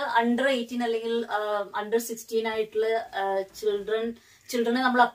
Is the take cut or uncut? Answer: uncut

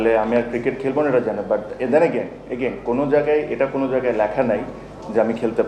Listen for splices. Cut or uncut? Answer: uncut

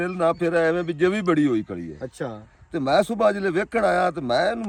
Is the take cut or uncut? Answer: uncut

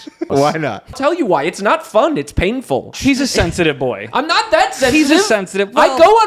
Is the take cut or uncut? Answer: cut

